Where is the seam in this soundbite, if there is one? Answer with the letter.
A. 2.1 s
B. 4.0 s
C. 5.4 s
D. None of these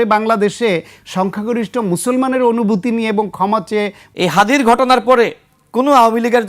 B